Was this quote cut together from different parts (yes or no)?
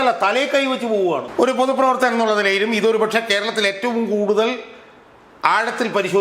yes